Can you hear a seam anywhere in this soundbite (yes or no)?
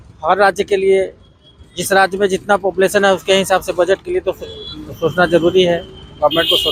no